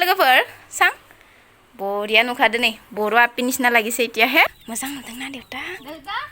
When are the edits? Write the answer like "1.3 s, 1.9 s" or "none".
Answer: 4.5 s